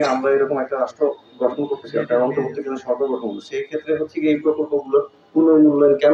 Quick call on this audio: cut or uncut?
uncut